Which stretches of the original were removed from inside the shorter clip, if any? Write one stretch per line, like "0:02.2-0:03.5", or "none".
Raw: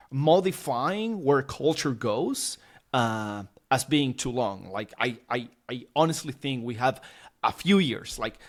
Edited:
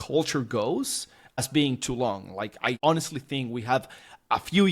0:02.9-0:03.8
0:05.1-0:05.9